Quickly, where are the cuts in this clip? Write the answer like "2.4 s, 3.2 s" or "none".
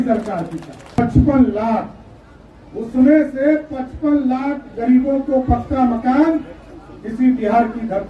1.0 s

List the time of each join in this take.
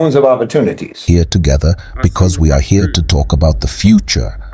1.0 s

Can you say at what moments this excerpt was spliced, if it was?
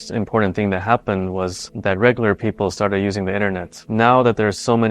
3.7 s

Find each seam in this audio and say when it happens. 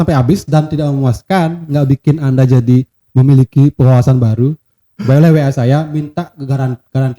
none

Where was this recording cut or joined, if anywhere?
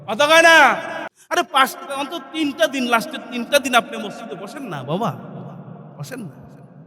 1.2 s

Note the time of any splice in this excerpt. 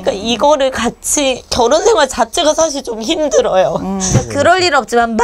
4.3 s

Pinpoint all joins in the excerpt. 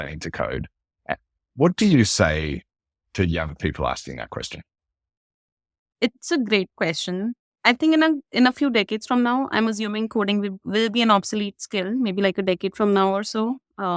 5.8 s, 7.5 s

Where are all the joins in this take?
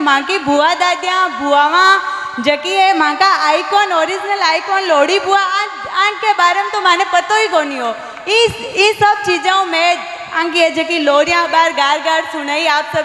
none

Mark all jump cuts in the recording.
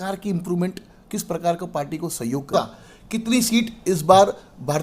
2.5 s

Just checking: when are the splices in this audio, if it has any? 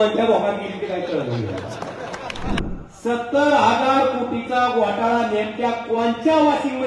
2.6 s

